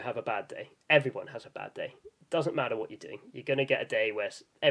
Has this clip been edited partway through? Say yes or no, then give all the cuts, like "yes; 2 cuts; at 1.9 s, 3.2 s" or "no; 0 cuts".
no; 0 cuts